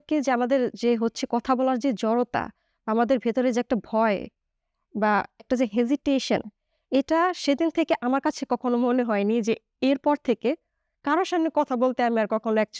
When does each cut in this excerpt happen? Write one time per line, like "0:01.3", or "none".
none